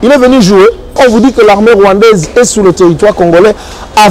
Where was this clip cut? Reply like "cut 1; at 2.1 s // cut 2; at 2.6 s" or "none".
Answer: cut 1; at 1.0 s